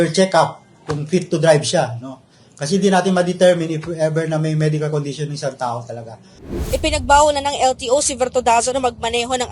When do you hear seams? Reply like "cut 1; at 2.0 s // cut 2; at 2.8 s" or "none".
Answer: cut 1; at 6.6 s